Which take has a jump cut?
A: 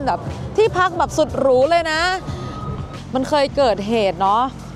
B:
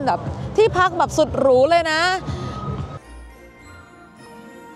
A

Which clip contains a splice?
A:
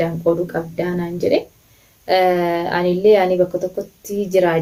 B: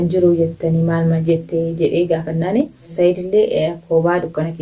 B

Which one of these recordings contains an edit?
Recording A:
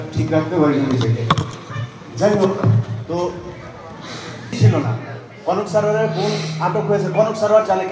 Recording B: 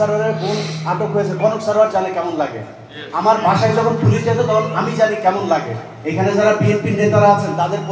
A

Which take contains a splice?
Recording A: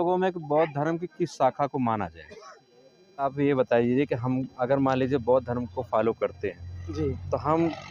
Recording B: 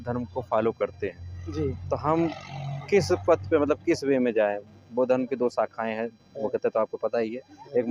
A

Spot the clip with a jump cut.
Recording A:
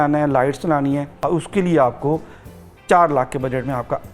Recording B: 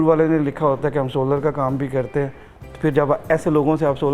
A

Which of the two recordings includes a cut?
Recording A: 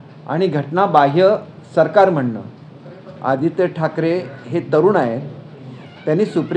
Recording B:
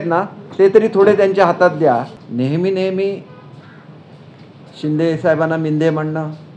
B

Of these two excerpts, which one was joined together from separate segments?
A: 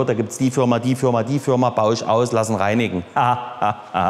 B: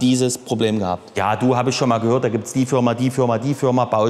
B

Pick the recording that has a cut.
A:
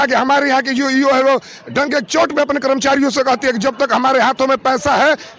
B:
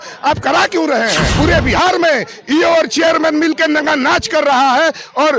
B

